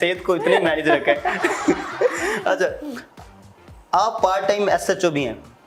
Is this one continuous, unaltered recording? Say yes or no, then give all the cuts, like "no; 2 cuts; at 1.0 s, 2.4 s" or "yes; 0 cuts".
yes; 0 cuts